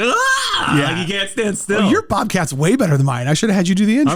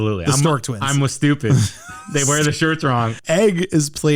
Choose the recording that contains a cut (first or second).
second